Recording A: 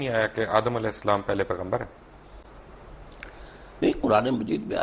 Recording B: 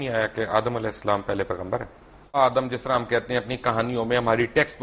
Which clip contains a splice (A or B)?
B